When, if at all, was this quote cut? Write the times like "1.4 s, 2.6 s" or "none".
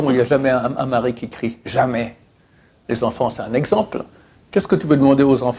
none